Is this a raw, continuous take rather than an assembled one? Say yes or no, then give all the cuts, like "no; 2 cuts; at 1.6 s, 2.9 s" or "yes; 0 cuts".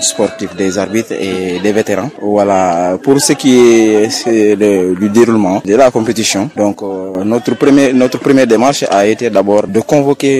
no; 4 cuts; at 2.1 s, 5.6 s, 6.5 s, 9.7 s